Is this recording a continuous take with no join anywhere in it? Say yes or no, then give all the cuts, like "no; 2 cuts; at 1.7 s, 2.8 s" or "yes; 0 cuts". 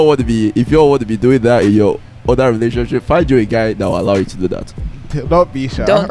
yes; 0 cuts